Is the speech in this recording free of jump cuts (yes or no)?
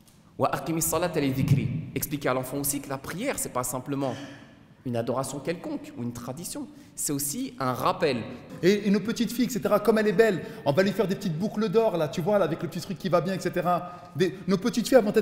no